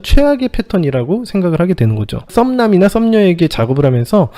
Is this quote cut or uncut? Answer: cut